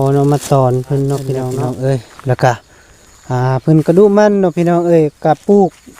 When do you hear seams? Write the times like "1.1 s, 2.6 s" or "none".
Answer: 1.4 s